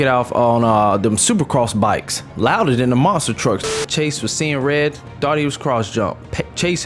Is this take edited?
yes; 2 cuts; at 2.3 s, 3.7 s

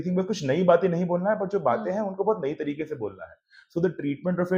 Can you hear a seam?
no; 0 cuts

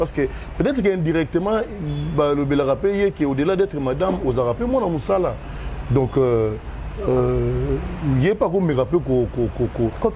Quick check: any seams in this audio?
no; 0 cuts

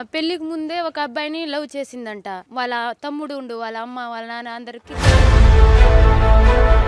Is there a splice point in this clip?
yes; 2 cuts; at 2.5 s, 5.0 s

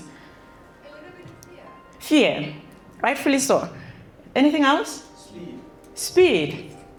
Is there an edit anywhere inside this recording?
no; 0 cuts

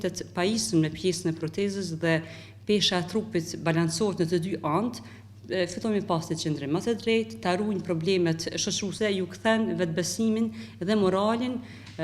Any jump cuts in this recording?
yes; 1 cut; at 8.9 s

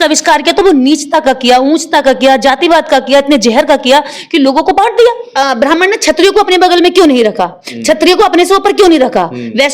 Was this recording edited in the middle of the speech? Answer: yes; 1 cut; at 5.3 s

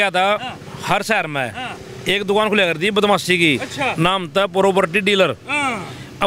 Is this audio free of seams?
yes; 0 cuts

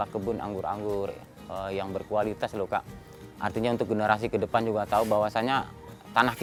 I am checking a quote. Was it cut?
no; 0 cuts

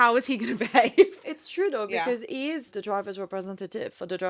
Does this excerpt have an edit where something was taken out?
yes; 2 cuts; at 1.2 s, 2.7 s

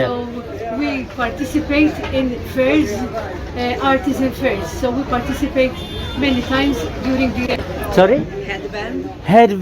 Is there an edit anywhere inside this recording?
yes; 1 cut; at 7.4 s

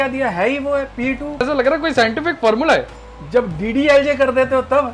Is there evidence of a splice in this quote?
yes; 2 cuts; at 1.4 s, 3.0 s

